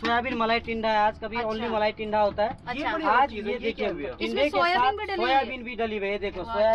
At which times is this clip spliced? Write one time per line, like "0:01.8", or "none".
none

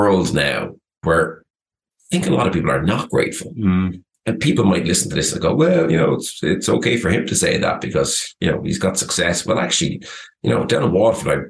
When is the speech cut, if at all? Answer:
0:01.0

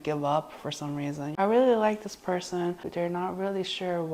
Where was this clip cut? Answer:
0:01.3
0:02.9

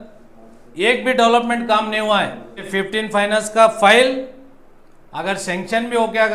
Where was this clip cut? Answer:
0:02.7

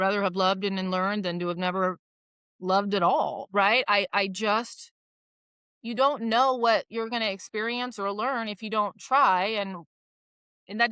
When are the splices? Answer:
none

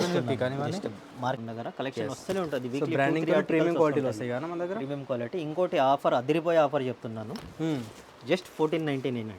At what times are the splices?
0:01.4

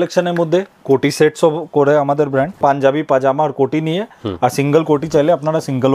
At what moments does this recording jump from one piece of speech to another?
0:02.5

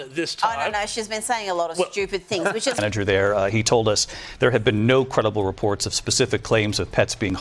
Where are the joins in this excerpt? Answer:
0:02.8

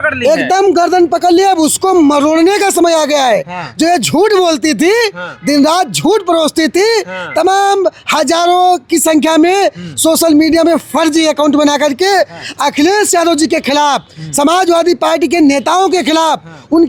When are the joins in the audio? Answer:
none

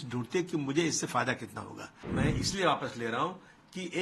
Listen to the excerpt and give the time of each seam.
0:01.9

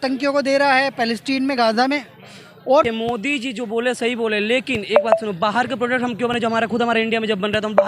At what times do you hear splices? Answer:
0:02.8

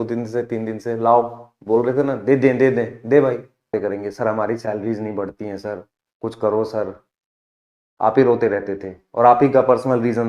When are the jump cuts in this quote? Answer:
0:03.7

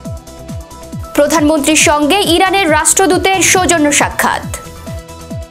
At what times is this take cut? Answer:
0:01.1
0:04.4

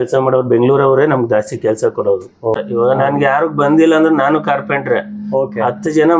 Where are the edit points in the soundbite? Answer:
0:02.6

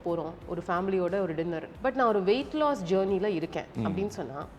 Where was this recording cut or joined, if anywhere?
0:01.7

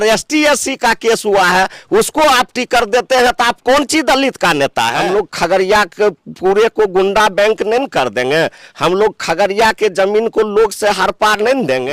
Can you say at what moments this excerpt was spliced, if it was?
0:05.0

